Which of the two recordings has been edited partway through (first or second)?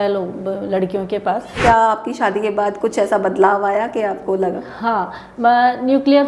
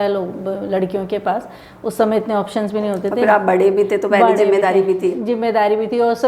first